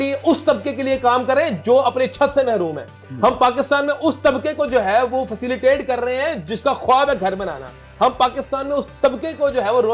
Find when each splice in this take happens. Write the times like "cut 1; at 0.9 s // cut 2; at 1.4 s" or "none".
none